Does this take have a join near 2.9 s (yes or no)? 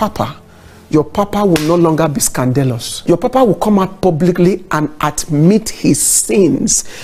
yes